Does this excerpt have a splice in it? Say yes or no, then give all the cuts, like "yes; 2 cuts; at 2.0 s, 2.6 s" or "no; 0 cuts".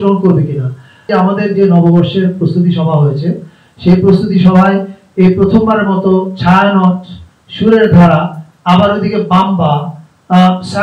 yes; 1 cut; at 1.1 s